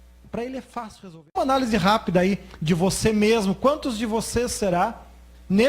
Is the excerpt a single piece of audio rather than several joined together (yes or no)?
no